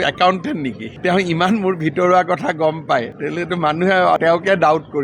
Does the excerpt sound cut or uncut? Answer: uncut